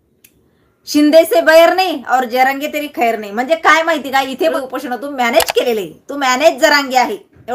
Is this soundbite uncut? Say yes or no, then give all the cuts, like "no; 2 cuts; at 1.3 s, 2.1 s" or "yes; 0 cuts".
no; 1 cut; at 4.6 s